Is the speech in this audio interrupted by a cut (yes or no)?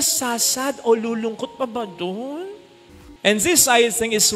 yes